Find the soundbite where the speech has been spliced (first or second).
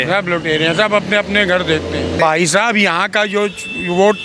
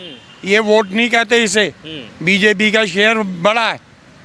first